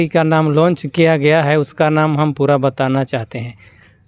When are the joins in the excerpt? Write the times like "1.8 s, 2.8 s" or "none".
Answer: none